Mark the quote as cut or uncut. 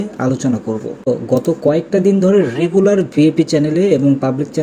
cut